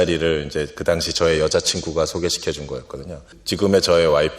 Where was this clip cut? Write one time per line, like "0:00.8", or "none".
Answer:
0:03.4